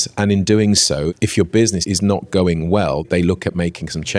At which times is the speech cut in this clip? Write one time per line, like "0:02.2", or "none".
0:01.1
0:01.8
0:03.1